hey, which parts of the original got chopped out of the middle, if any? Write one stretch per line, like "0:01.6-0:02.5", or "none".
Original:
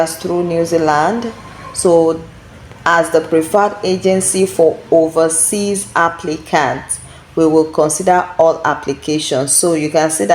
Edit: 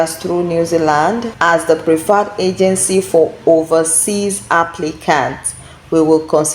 0:01.3-0:02.7